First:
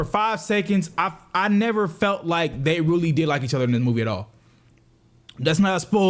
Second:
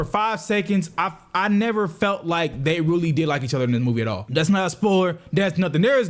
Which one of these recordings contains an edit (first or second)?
second